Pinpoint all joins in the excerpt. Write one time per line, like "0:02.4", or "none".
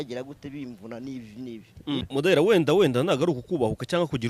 0:02.0